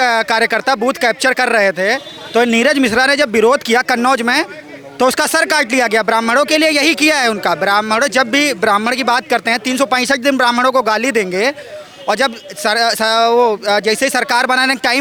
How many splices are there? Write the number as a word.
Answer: zero